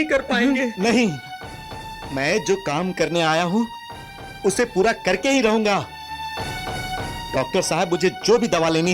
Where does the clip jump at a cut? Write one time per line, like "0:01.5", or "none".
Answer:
none

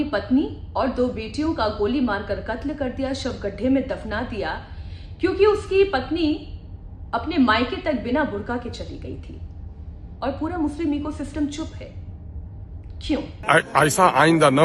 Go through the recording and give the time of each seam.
0:13.3

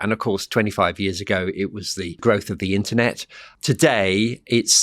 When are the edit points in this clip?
0:02.2
0:03.5

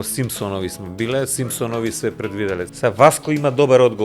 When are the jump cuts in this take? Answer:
0:02.7

